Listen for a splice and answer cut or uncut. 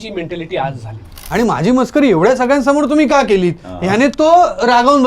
cut